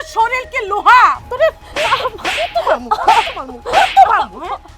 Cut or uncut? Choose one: cut